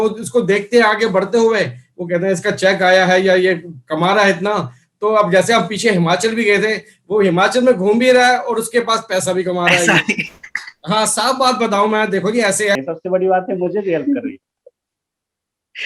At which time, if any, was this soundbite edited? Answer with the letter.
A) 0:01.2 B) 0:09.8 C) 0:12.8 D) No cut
C